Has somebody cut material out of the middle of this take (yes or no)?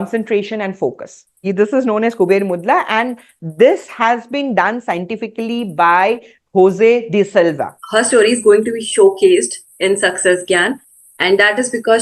yes